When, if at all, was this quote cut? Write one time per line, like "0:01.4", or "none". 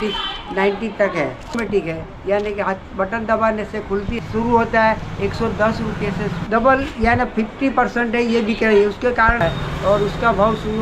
0:01.6
0:04.2
0:06.4
0:09.4

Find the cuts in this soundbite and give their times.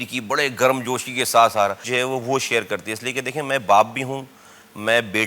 0:01.8

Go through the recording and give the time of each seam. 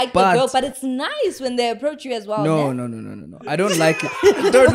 none

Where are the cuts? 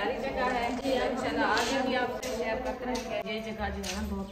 0:03.3

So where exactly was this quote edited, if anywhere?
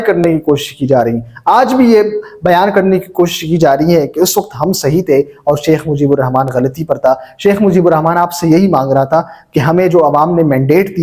none

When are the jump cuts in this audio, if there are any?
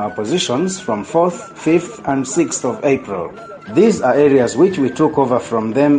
none

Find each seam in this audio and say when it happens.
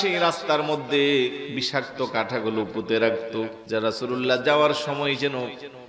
0:01.5
0:03.6

